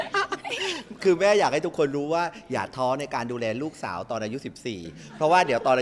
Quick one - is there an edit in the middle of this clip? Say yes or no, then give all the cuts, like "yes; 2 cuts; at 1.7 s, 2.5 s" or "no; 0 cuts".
no; 0 cuts